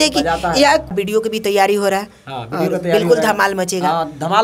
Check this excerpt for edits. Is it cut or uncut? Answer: cut